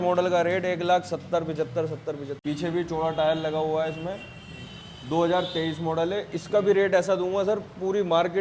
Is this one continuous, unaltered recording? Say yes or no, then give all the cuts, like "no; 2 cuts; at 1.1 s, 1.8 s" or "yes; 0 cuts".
no; 1 cut; at 2.3 s